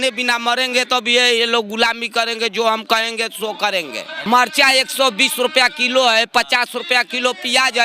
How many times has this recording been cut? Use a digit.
1